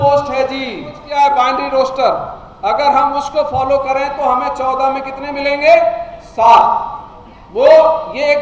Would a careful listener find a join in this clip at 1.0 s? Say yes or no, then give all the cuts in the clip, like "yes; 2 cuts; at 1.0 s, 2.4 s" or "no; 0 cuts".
yes; 1 cut; at 1.0 s